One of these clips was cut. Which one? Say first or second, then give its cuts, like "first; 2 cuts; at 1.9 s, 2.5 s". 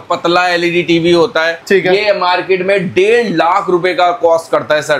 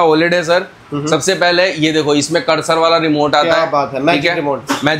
first; 1 cut; at 1.6 s